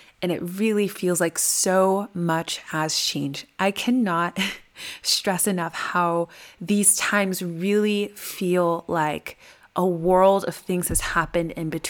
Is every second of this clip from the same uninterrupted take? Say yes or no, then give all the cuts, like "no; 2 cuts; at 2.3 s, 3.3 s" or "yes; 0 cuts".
yes; 0 cuts